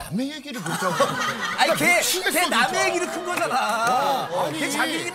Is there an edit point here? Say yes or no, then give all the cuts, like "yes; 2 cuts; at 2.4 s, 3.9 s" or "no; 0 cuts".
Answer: no; 0 cuts